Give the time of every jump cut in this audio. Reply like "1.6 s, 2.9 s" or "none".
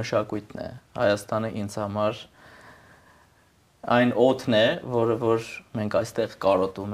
none